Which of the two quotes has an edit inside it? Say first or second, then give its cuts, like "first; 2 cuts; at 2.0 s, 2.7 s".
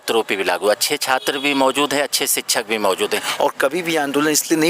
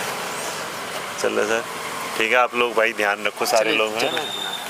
first; 1 cut; at 3.3 s